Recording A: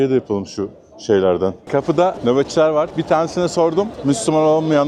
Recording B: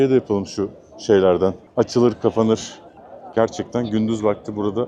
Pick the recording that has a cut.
A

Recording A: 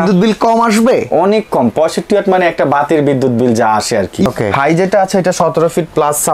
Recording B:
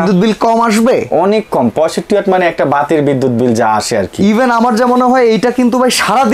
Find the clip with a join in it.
A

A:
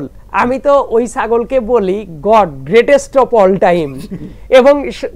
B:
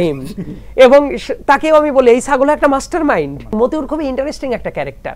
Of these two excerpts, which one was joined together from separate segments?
B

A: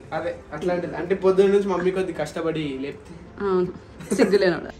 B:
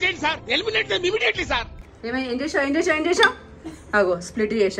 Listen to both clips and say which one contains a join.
B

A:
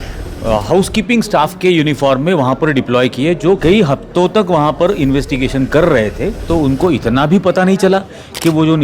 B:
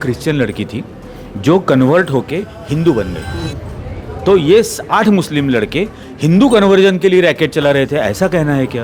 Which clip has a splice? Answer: A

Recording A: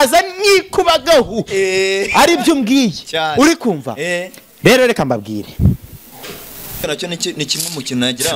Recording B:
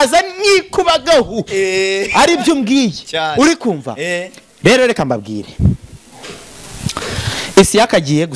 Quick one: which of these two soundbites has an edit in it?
A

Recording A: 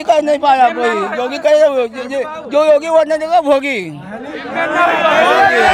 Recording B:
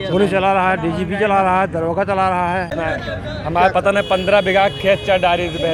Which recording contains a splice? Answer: B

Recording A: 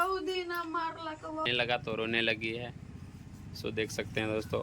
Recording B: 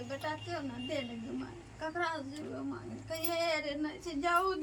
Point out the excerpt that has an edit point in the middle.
A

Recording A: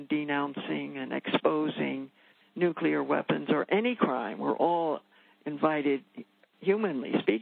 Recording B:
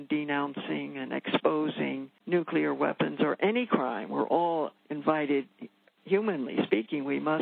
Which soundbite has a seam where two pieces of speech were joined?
B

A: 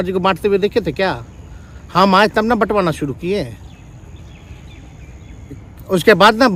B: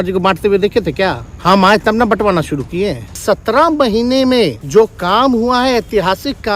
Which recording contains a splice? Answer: B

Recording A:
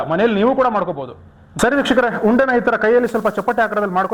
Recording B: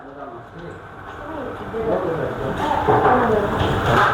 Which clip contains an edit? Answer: A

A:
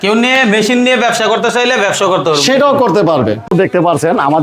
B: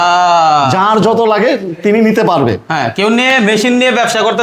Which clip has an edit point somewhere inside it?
A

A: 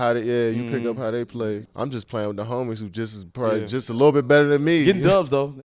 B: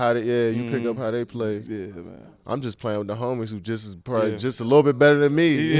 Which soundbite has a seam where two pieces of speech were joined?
A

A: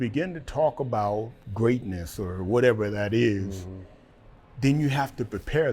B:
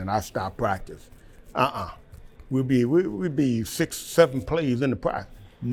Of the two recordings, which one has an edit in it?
A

